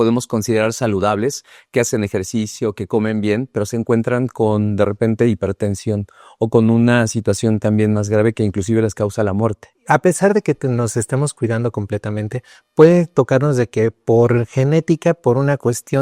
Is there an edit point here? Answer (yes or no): yes